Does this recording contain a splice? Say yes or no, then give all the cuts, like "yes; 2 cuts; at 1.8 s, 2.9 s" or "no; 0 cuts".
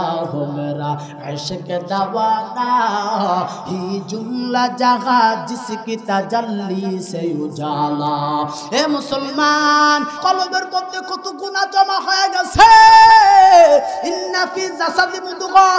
yes; 1 cut; at 10.1 s